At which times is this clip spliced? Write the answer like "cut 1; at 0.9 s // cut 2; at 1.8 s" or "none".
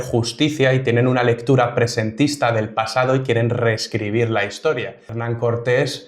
cut 1; at 5.1 s